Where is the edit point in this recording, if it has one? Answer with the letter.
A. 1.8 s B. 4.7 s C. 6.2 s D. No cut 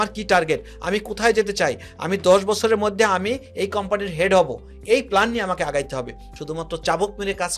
C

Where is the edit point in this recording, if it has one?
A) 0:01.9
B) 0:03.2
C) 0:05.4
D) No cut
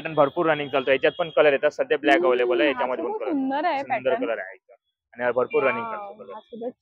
D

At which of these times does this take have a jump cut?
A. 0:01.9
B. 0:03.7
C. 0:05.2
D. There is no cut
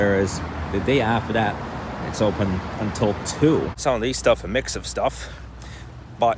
B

